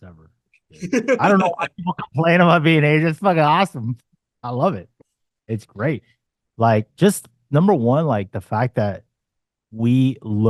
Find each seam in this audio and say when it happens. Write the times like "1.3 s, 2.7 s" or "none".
none